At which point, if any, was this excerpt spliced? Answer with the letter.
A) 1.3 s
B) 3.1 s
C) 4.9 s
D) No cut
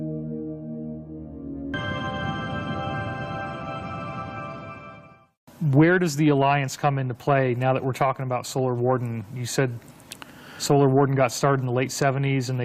D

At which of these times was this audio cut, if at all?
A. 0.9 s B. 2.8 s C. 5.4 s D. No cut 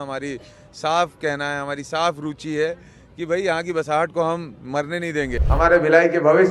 C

